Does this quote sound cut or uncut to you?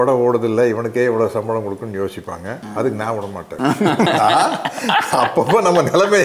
uncut